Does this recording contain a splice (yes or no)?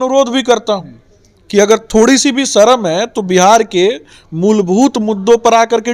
no